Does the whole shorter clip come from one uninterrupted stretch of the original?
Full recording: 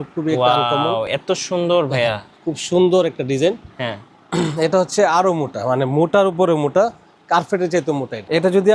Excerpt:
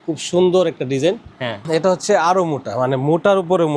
no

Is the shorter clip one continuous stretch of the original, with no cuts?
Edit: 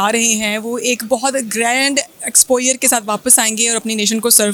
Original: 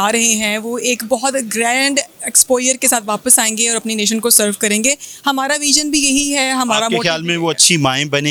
yes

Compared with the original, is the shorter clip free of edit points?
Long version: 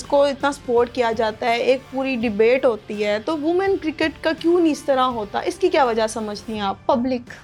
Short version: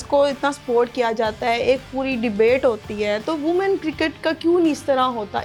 yes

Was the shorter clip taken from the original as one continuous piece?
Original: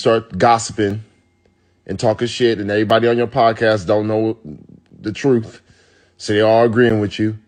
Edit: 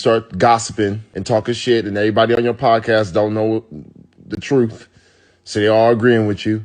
no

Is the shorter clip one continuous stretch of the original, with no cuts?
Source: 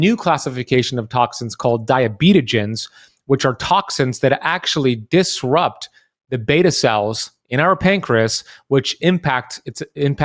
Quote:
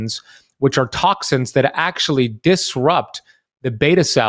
yes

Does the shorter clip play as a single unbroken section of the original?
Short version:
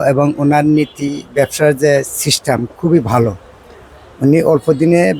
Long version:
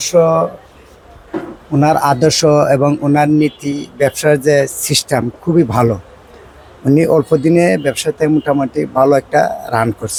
yes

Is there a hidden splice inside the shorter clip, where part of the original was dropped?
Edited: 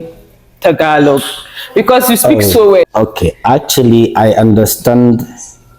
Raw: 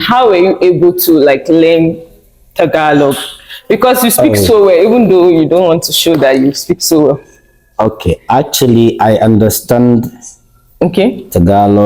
yes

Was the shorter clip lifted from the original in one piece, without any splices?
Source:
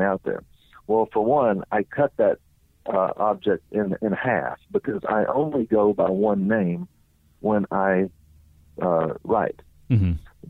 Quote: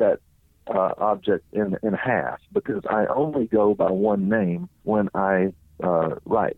no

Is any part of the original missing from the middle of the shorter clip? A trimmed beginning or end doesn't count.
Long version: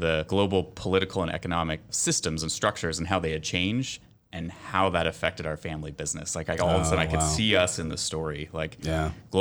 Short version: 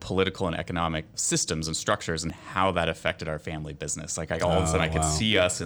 yes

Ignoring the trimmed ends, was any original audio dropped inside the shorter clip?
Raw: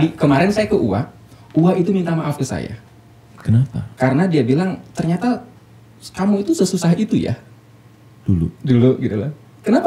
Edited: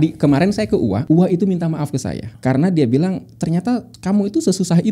yes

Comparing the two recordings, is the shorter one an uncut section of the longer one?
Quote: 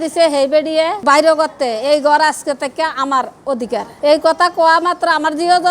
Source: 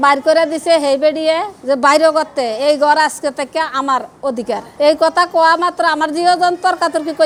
no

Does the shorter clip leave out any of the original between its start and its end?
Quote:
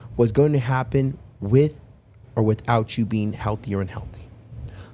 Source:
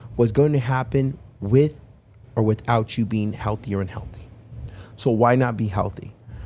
no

